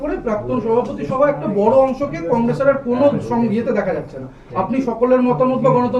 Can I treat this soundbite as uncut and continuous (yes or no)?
yes